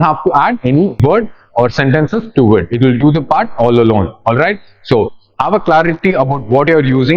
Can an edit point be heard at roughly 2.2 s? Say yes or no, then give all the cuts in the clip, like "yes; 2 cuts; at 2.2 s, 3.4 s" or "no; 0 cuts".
no; 1 cut; at 1.0 s